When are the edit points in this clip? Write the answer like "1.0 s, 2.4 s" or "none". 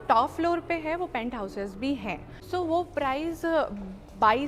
2.3 s